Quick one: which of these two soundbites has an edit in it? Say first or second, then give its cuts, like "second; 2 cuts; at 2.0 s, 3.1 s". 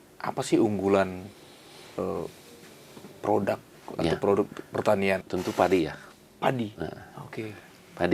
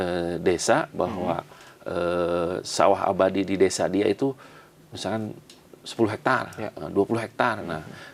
first; 1 cut; at 5.2 s